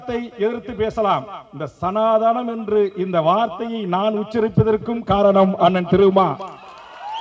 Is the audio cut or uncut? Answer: uncut